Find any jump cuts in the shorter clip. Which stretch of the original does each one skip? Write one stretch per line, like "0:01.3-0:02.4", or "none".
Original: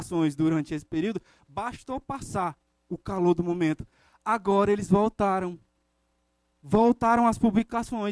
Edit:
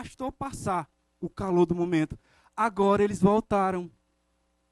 none